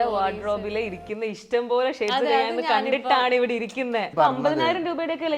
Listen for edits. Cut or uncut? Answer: cut